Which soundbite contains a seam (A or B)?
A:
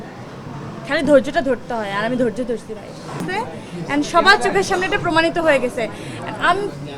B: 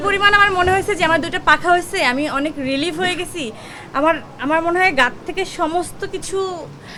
A